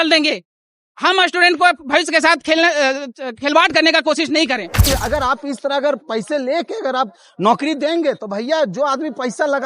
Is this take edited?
yes; 1 cut; at 4.7 s

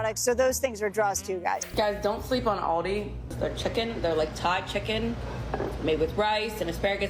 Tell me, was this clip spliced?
yes; 1 cut; at 1.6 s

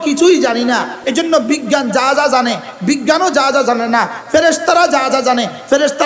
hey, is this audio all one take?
no; 1 cut; at 1.0 s

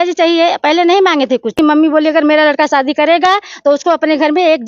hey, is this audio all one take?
no; 1 cut; at 1.5 s

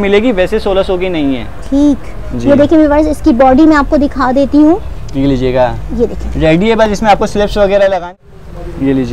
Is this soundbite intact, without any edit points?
no; 1 cut; at 8.0 s

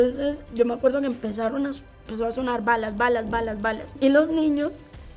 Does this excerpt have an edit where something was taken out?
yes; 1 cut; at 3.8 s

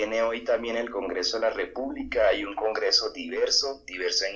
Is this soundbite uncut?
yes; 0 cuts

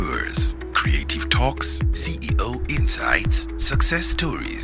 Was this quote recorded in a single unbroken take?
yes; 0 cuts

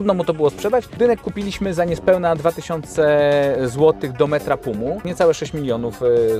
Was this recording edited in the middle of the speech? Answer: yes; 2 cuts; at 0.9 s, 5.1 s

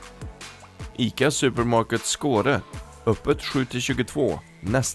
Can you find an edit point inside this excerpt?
yes; 1 cut; at 0.9 s

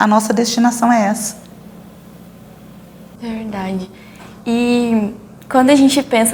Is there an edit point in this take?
no; 0 cuts

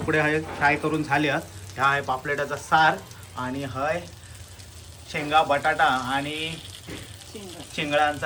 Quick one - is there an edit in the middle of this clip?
no; 0 cuts

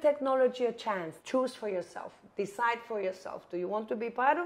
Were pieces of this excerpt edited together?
yes; 1 cut; at 1.1 s

